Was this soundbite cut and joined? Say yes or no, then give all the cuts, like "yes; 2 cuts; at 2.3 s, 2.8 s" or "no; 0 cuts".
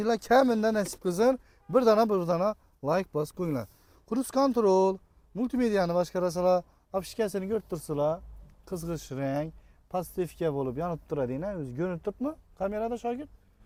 no; 0 cuts